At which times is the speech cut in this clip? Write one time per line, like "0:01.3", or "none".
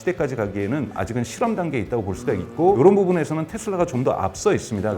0:01.0
0:02.8